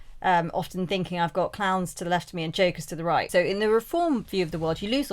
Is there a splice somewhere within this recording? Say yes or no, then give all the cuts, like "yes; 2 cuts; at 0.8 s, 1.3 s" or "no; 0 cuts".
yes; 1 cut; at 3.3 s